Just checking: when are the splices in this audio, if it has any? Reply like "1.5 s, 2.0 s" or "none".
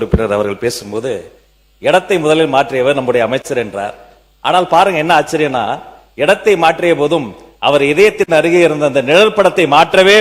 none